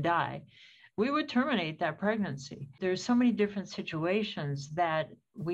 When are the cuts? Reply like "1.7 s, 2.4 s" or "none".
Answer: 2.8 s